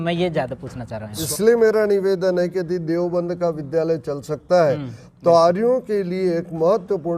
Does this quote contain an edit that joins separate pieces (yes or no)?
yes